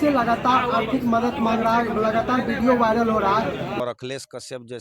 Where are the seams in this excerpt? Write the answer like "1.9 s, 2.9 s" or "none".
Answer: 3.8 s